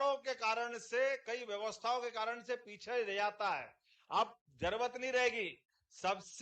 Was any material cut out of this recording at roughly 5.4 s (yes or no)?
no